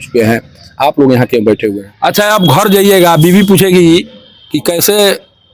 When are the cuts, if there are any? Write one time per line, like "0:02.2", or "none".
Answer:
0:01.9